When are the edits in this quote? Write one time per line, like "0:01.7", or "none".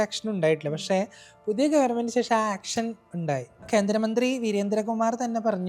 0:03.7